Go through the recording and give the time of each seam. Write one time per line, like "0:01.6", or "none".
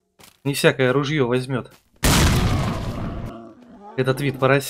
0:03.3

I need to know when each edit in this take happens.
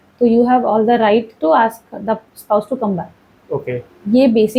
none

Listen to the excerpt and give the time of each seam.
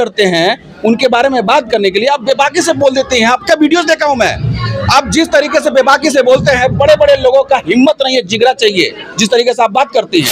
none

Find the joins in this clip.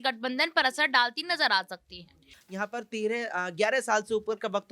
0:02.3

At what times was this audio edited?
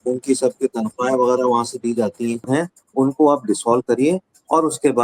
0:02.5

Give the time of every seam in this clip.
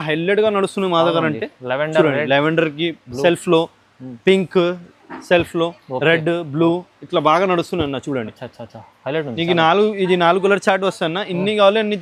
none

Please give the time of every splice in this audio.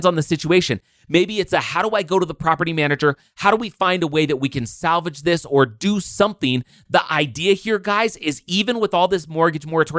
none

